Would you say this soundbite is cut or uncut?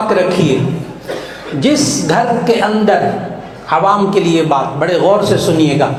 uncut